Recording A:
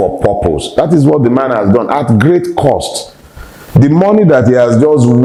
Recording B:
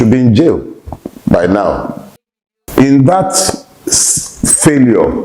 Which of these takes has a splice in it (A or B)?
B